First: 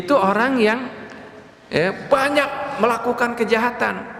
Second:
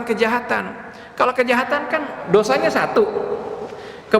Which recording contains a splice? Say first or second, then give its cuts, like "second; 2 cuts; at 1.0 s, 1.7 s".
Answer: second; 1 cut; at 2.2 s